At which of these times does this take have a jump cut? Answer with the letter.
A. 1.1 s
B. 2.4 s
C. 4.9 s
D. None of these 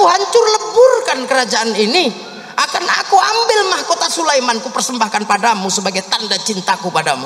D